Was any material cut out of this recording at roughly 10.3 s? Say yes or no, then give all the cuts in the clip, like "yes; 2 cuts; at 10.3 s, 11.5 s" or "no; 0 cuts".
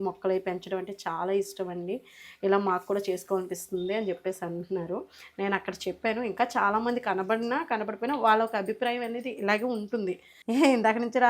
yes; 1 cut; at 10.3 s